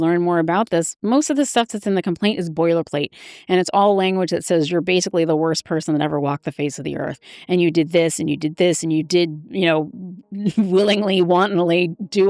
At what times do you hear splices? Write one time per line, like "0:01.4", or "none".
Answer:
none